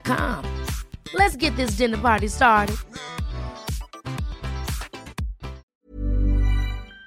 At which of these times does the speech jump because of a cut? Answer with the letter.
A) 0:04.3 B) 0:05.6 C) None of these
B